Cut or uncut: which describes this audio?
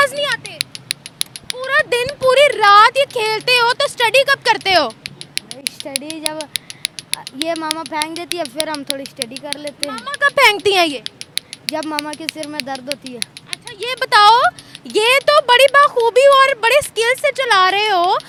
uncut